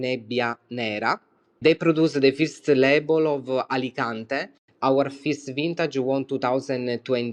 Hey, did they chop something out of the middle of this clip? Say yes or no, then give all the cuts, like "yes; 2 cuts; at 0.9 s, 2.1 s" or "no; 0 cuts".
no; 0 cuts